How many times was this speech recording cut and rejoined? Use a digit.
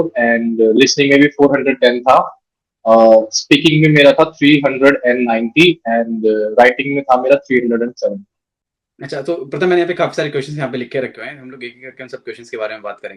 0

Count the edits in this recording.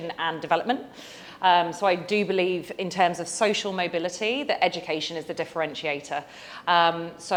0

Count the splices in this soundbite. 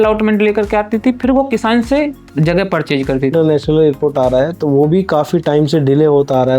1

